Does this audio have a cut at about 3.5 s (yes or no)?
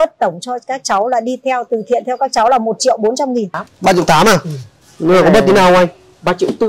yes